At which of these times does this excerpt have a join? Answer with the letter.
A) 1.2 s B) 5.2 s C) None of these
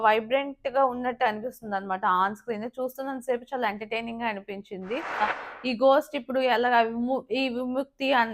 B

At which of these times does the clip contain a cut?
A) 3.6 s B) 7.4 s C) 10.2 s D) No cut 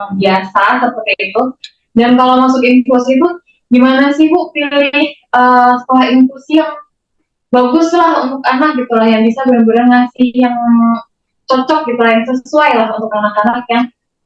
D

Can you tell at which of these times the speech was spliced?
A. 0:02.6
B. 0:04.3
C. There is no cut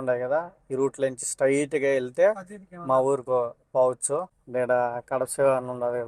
B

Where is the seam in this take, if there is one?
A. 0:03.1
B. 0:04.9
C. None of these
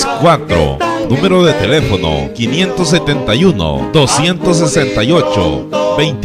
B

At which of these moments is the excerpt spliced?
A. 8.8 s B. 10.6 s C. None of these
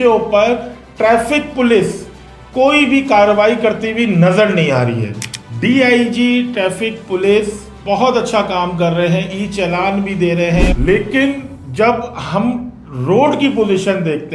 B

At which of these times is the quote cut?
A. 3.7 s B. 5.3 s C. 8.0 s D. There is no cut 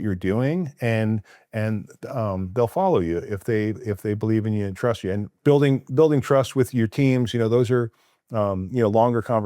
B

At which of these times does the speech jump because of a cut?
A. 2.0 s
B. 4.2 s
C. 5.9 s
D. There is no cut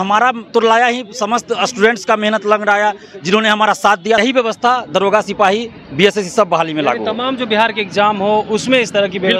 B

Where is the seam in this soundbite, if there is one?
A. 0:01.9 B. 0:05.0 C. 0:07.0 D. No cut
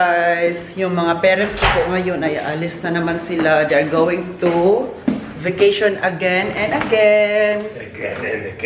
D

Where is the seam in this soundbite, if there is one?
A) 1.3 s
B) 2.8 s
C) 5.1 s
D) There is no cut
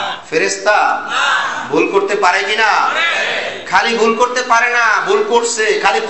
D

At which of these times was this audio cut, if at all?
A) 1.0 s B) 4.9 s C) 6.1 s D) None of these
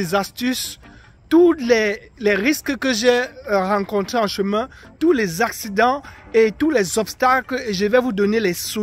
D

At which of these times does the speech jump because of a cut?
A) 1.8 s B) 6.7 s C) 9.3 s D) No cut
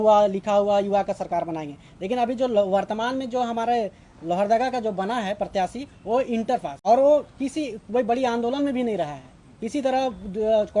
B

